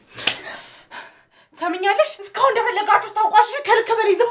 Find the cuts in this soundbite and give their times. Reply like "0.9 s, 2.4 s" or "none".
2.2 s